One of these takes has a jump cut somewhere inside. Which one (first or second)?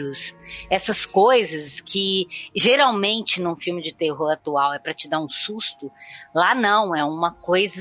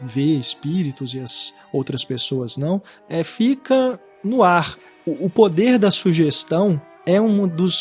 second